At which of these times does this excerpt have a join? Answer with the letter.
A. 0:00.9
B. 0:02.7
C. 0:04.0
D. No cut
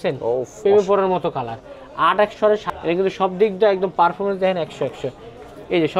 B